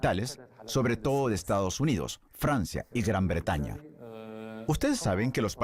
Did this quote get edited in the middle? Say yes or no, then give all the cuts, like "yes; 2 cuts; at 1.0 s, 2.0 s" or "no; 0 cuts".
no; 0 cuts